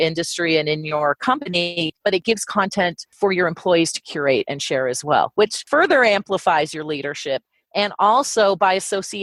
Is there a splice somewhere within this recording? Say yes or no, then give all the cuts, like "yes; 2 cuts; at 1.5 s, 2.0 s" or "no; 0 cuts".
no; 0 cuts